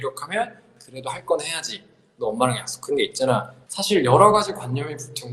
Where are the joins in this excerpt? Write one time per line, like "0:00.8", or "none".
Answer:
0:03.6